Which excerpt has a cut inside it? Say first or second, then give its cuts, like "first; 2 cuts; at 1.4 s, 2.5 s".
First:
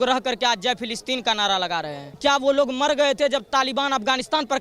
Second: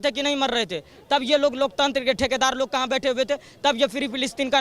first; 1 cut; at 2.0 s